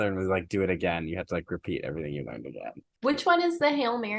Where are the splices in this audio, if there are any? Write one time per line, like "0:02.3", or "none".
0:02.9